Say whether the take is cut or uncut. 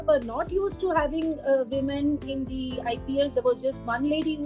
uncut